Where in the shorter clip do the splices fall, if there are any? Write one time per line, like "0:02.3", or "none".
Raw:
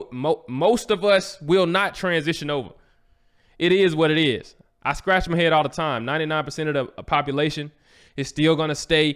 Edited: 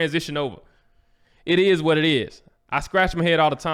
none